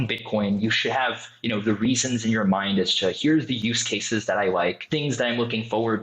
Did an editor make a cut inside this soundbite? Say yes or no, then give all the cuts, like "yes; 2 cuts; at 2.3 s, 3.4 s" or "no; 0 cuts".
yes; 1 cut; at 4.8 s